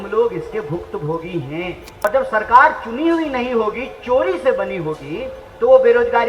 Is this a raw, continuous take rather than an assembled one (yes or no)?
no